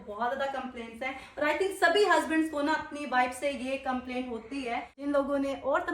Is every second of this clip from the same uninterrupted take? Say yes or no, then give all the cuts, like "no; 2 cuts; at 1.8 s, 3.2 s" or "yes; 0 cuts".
no; 1 cut; at 5.0 s